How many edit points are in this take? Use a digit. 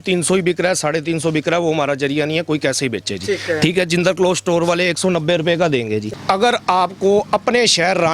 1